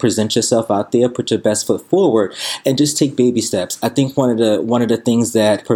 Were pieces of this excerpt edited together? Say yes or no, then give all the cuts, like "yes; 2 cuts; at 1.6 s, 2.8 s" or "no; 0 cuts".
no; 0 cuts